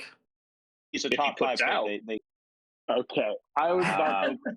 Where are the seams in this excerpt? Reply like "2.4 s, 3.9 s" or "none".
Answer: 2.2 s

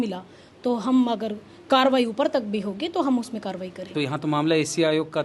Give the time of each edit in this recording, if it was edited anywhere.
3.8 s

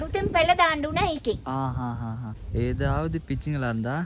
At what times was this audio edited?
2.3 s

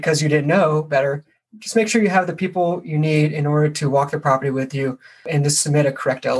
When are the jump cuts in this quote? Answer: 5.3 s

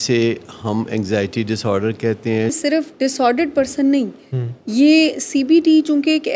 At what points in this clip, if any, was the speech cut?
2.6 s

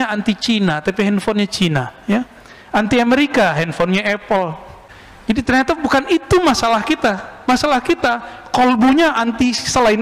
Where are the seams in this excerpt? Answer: none

